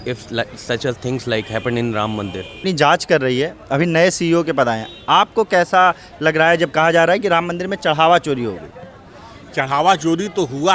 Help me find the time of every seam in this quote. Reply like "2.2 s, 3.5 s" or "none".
none